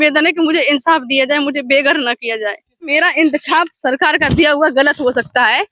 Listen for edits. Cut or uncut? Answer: cut